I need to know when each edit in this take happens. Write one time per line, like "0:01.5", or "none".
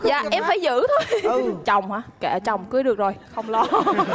0:01.6